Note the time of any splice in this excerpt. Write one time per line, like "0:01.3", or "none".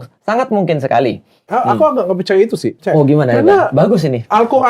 0:01.5
0:02.8